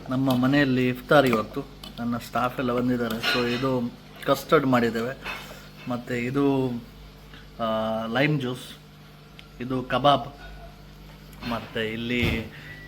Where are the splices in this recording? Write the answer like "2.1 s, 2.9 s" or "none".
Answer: none